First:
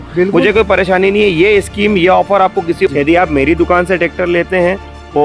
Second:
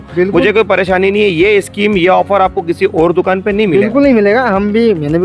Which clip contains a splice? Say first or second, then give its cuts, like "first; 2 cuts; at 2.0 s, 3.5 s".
first; 1 cut; at 2.9 s